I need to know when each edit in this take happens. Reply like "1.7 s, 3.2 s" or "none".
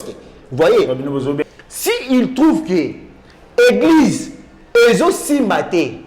1.4 s